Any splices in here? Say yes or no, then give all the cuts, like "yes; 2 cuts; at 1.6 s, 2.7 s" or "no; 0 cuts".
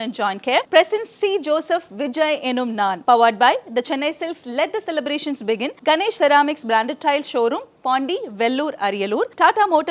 no; 0 cuts